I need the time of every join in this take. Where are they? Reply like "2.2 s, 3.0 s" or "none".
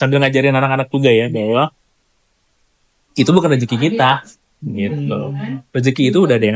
none